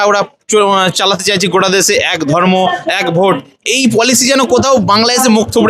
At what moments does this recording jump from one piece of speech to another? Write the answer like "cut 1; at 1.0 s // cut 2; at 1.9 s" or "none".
none